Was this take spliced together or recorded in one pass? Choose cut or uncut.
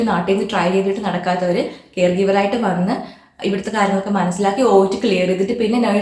uncut